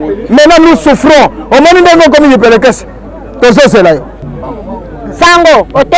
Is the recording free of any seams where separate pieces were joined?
no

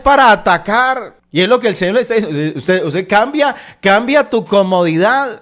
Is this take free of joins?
yes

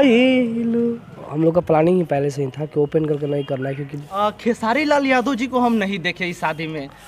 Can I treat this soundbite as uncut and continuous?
no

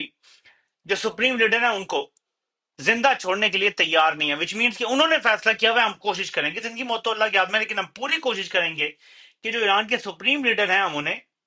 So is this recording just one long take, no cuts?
yes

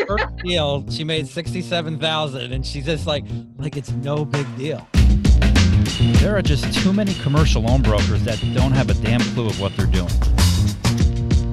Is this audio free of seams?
no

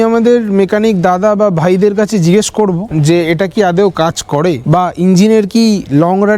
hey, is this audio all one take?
yes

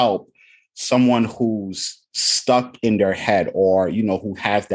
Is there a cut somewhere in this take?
no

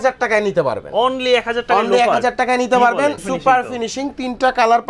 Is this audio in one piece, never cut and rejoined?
no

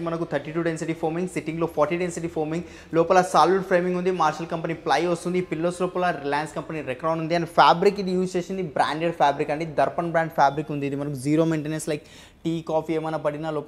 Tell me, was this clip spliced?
no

